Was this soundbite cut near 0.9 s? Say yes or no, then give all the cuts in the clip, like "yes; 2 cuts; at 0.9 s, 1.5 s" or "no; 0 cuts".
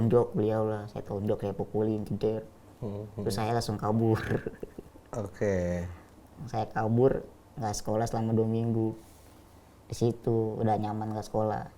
no; 0 cuts